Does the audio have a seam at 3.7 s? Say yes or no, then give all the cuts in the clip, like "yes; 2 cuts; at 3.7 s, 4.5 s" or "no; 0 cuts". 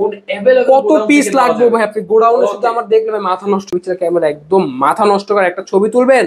yes; 1 cut; at 3.7 s